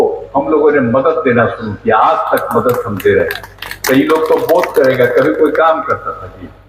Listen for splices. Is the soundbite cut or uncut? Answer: uncut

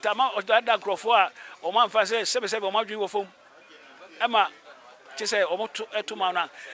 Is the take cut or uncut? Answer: uncut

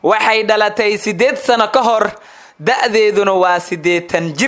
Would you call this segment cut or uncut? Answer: uncut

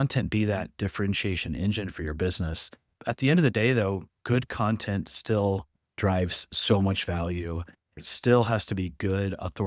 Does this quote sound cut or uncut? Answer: cut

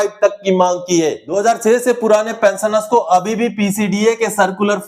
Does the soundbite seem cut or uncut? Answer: cut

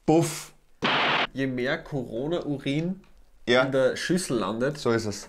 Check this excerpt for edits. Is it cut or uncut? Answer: cut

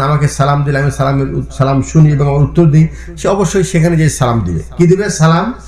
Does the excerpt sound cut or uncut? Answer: uncut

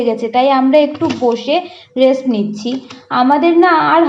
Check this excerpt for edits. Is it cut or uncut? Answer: uncut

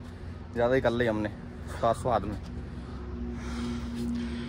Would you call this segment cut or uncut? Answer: uncut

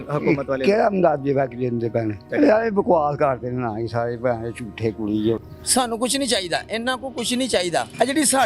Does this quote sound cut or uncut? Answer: cut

